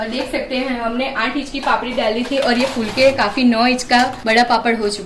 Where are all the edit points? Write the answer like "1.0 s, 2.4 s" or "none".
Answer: 4.2 s